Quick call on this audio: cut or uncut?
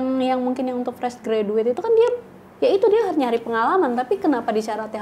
uncut